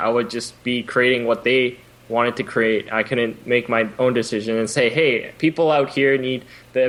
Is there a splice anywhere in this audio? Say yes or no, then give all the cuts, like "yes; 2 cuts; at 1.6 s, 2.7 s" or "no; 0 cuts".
no; 0 cuts